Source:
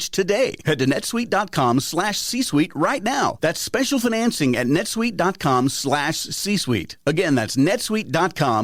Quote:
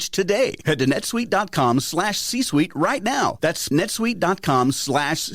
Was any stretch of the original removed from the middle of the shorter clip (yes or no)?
yes